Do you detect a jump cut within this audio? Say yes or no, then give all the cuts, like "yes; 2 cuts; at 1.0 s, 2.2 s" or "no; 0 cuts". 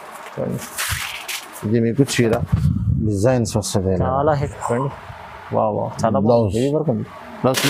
yes; 1 cut; at 4.4 s